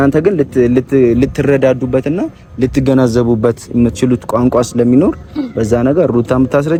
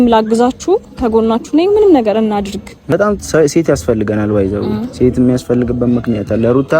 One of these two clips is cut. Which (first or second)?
second